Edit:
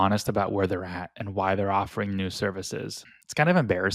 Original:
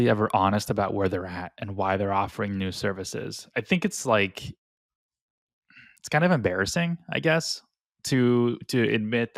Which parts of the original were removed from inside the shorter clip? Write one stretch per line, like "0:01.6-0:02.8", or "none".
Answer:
0:03.4-0:05.7